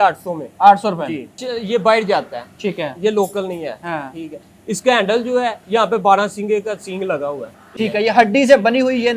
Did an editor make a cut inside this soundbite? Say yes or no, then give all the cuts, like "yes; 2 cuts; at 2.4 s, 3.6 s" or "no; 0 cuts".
yes; 2 cuts; at 1.4 s, 7.5 s